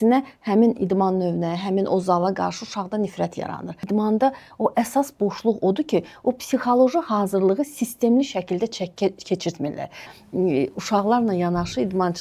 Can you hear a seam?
yes; 2 cuts; at 3.8 s, 10.1 s

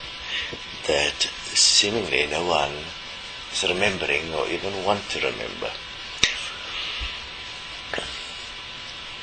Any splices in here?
yes; 1 cut; at 6.3 s

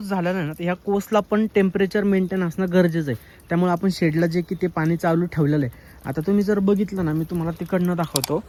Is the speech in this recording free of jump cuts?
yes; 0 cuts

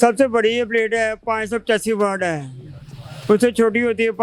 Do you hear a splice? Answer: no; 0 cuts

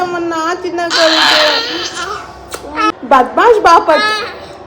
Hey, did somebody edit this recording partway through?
yes; 1 cut; at 2.9 s

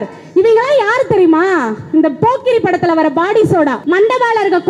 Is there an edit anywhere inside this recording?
yes; 1 cut; at 3.8 s

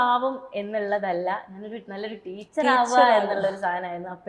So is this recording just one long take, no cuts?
yes; 0 cuts

